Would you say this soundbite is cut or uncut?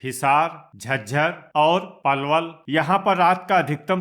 cut